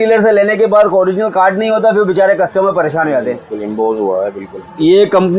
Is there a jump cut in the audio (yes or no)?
no